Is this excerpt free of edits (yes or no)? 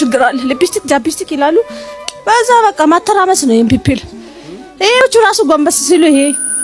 no